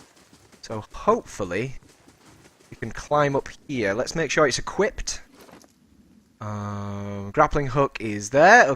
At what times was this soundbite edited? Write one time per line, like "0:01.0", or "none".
0:07.5